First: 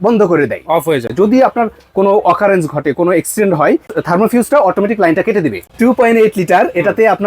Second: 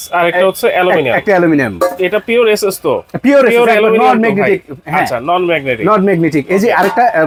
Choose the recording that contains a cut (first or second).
first